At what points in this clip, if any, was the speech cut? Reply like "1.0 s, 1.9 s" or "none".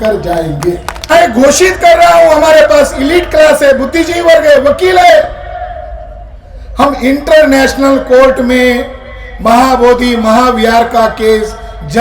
1.1 s